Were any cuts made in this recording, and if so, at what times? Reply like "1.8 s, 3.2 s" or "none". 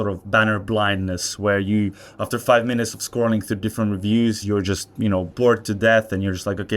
5.3 s